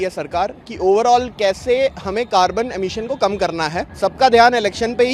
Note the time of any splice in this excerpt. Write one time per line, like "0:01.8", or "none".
0:03.9